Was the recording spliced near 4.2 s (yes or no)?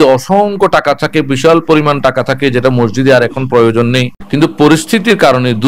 yes